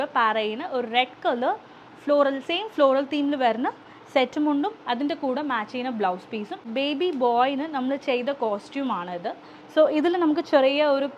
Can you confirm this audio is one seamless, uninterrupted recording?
no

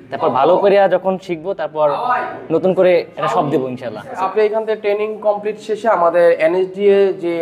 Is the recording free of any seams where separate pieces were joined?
no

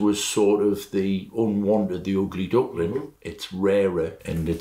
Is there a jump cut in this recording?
no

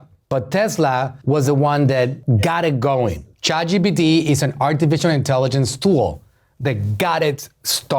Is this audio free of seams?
no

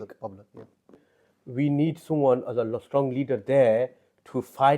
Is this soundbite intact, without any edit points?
no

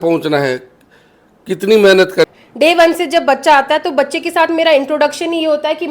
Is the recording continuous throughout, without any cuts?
no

